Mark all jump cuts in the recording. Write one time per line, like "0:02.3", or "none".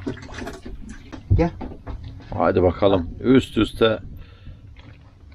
0:01.1